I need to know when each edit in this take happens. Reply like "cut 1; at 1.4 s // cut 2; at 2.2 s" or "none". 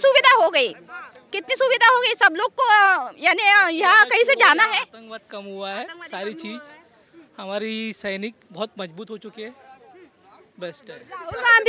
none